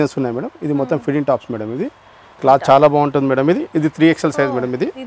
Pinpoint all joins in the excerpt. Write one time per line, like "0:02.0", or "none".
0:02.2